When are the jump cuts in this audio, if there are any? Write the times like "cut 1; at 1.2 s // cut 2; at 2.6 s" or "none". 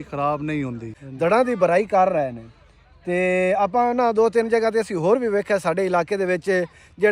cut 1; at 1.0 s